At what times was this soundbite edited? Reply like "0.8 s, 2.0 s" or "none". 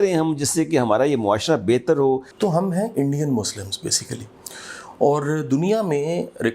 2.3 s